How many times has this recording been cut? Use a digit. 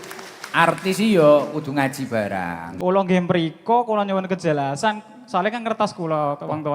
1